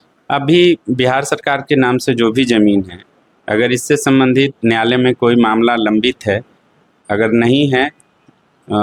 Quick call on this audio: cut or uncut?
uncut